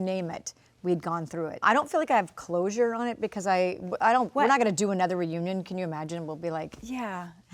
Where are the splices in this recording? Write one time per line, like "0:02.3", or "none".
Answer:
0:01.6